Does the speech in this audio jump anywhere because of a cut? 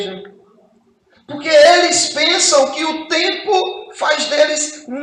no; 0 cuts

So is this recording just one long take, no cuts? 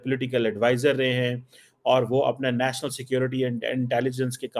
yes; 0 cuts

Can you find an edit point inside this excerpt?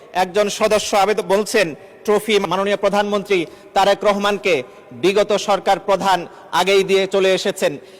yes; 1 cut; at 2.4 s

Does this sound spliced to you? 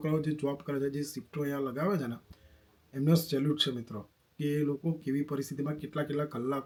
no; 0 cuts

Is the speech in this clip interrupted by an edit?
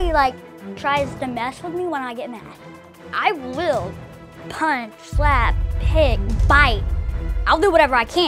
no; 0 cuts

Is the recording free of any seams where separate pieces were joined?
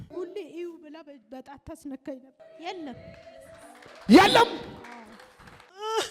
no; 1 cut; at 2.4 s

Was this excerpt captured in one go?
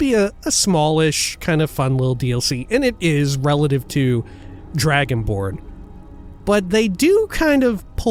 yes; 0 cuts

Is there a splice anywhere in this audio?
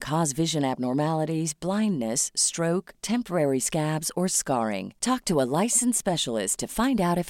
no; 0 cuts

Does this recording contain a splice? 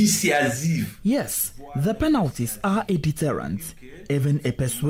no; 0 cuts

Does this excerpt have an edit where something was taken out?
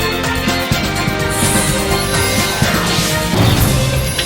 no; 0 cuts

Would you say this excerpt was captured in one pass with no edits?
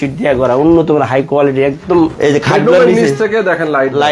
no; 1 cut; at 2.1 s

